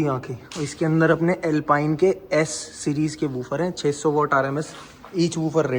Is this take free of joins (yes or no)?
yes